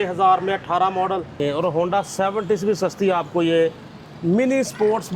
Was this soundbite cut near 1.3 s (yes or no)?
yes